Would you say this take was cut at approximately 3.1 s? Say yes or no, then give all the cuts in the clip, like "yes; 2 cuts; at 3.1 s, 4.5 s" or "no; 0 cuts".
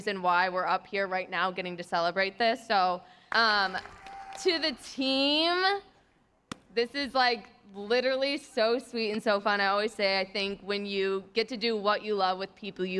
yes; 1 cut; at 3.1 s